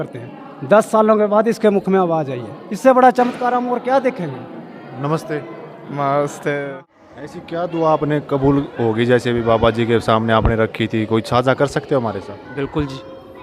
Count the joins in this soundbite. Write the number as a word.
one